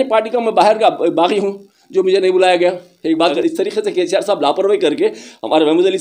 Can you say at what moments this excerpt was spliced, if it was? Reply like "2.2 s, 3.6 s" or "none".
3.4 s